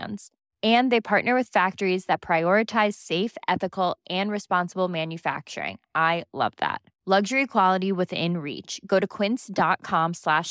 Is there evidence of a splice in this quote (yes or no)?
no